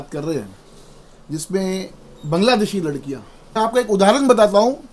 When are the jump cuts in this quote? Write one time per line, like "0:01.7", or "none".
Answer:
0:03.5